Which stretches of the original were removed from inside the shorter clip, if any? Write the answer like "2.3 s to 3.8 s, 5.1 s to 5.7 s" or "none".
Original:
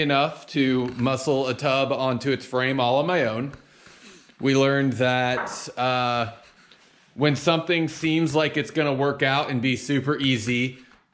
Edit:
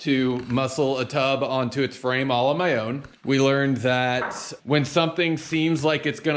3.5 s to 4.2 s, 5.6 s to 6.9 s